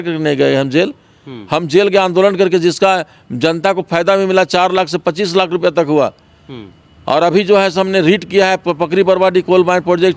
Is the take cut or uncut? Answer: uncut